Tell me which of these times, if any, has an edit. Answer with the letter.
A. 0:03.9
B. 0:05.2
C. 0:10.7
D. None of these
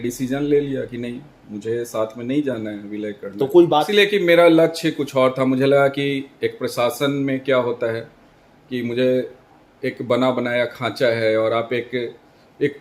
A